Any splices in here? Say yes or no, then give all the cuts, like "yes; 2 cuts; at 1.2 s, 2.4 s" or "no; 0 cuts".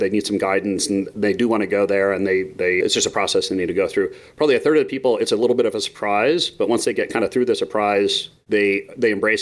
yes; 1 cut; at 8.3 s